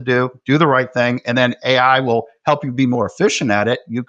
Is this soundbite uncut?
no; 1 cut; at 2.3 s

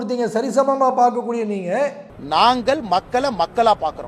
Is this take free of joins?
no; 1 cut; at 2.1 s

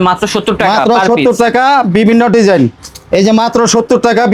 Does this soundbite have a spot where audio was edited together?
no; 0 cuts

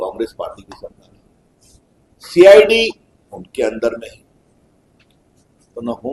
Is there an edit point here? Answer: no; 0 cuts

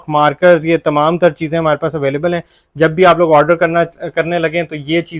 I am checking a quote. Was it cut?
no; 0 cuts

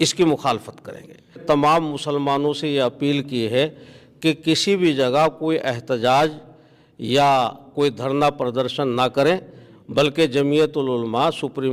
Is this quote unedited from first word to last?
no; 1 cut; at 1.4 s

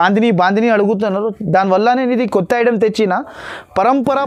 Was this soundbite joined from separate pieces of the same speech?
no; 0 cuts

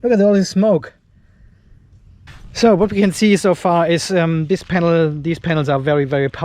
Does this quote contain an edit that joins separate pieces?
yes; 1 cut; at 2.0 s

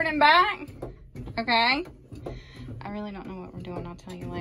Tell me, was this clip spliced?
no; 0 cuts

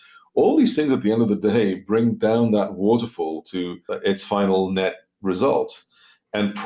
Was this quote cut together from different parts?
yes; 1 cut; at 3.9 s

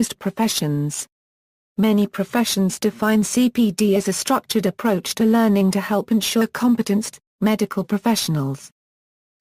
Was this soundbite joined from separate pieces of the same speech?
no; 0 cuts

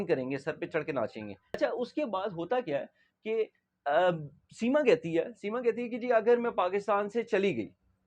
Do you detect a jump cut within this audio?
yes; 1 cut; at 1.6 s

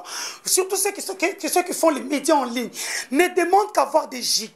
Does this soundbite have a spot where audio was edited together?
no; 0 cuts

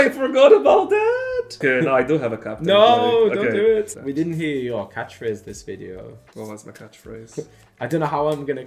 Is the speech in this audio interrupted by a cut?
yes; 2 cuts; at 1.6 s, 3.9 s

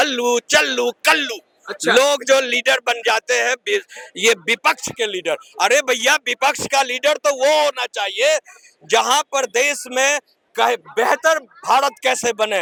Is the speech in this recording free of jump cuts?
yes; 0 cuts

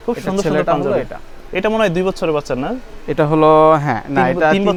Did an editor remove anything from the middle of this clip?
no; 0 cuts

